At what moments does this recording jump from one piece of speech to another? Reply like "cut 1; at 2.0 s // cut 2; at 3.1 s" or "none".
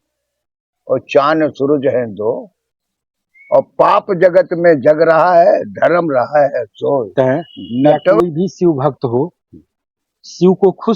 cut 1; at 8.2 s